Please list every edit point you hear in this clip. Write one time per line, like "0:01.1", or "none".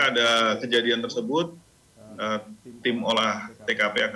none